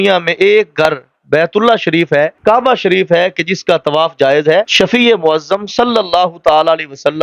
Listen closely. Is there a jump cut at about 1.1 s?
no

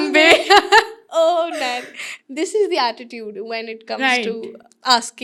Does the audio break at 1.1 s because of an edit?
no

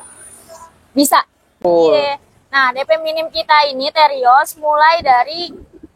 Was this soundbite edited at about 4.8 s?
no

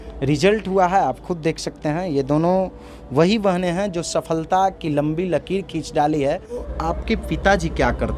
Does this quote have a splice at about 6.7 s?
yes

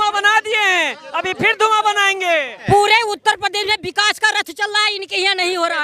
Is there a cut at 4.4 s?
no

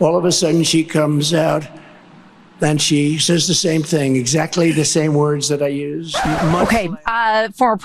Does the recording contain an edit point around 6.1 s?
yes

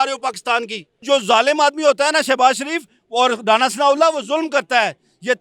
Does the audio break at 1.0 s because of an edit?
yes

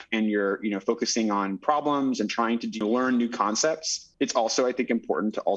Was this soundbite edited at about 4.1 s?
yes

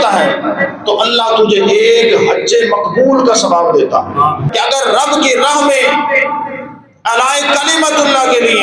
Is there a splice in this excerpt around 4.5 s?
yes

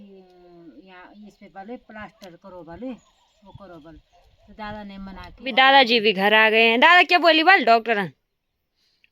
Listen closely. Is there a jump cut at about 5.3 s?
yes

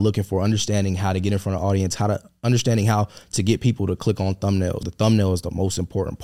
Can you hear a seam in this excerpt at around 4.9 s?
yes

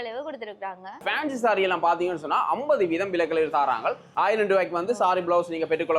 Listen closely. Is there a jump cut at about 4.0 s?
yes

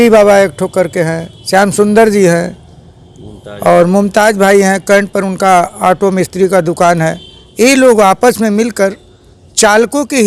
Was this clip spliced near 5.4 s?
no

